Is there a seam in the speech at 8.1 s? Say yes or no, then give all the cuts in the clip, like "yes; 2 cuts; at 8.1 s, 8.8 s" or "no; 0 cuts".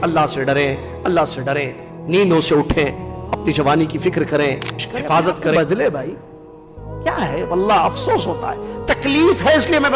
no; 1 cut; at 5.6 s